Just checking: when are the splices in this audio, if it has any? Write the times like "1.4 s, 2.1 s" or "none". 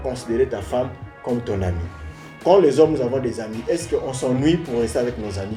none